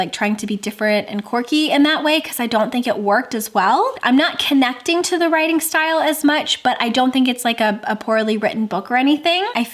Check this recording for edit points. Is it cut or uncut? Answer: uncut